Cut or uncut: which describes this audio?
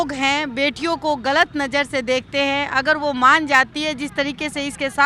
uncut